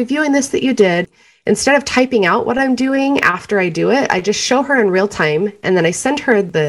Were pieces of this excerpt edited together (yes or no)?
yes